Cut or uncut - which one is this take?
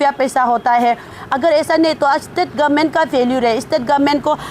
cut